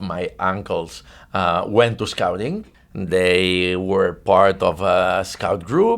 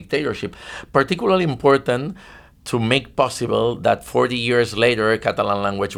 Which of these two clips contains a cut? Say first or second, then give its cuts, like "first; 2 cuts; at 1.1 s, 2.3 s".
first; 1 cut; at 2.7 s